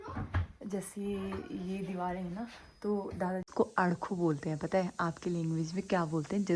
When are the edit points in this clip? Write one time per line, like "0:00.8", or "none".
0:03.5